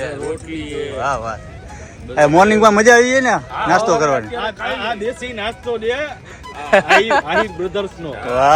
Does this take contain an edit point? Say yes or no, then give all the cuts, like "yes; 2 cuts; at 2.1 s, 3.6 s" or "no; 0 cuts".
no; 0 cuts